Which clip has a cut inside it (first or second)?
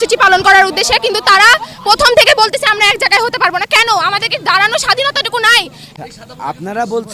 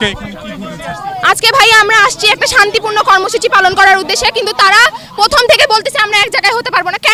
first